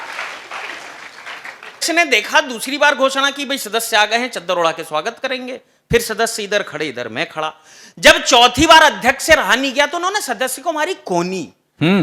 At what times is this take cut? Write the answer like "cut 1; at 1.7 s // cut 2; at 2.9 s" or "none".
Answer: cut 1; at 1.8 s